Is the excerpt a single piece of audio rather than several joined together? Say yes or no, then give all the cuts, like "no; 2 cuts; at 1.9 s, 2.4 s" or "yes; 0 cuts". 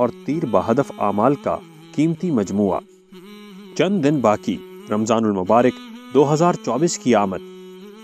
yes; 0 cuts